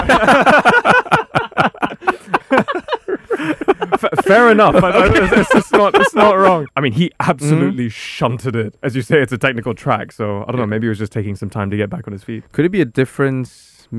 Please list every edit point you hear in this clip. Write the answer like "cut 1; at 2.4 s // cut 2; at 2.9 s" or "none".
cut 1; at 6.6 s // cut 2; at 8.7 s // cut 3; at 12.4 s